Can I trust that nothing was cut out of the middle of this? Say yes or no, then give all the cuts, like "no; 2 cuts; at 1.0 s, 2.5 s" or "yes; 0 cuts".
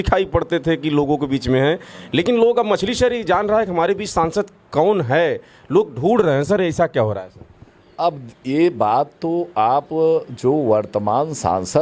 yes; 0 cuts